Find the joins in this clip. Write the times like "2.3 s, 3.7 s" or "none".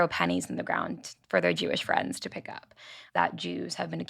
3.0 s